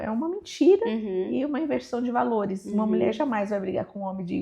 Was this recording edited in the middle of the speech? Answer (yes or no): no